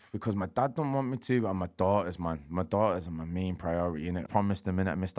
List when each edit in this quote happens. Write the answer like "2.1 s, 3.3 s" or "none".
4.2 s